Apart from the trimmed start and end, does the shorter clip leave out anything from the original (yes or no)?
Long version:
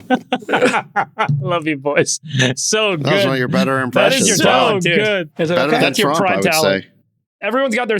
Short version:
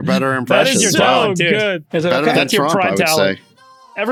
no